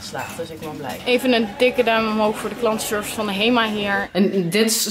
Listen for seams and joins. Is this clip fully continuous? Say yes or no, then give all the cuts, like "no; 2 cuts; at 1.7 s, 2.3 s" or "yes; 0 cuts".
no; 2 cuts; at 1.0 s, 4.0 s